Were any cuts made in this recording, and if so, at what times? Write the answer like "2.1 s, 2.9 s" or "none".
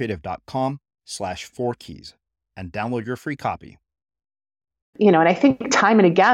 5.0 s